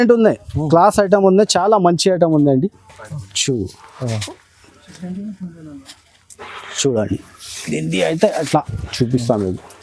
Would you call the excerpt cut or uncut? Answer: uncut